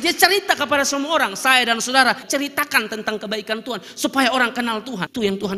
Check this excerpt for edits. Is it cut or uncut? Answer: uncut